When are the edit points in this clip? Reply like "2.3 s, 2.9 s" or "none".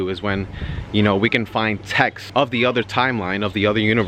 2.2 s